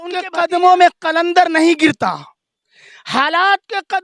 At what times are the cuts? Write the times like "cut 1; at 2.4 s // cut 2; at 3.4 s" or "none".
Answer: none